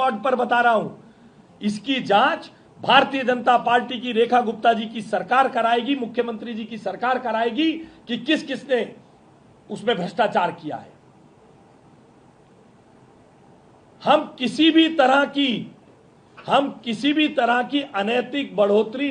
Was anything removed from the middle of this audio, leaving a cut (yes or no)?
no